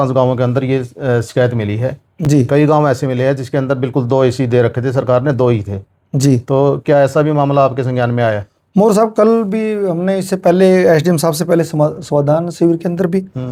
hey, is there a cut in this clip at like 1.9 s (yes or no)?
no